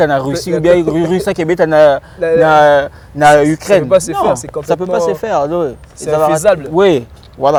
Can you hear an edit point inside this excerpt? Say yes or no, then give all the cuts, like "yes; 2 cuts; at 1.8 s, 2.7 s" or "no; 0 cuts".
no; 0 cuts